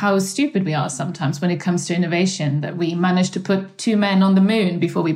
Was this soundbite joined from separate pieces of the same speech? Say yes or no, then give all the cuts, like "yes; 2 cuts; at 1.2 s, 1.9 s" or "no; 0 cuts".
no; 0 cuts